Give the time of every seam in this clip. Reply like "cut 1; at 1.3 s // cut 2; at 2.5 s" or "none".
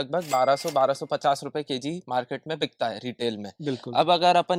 none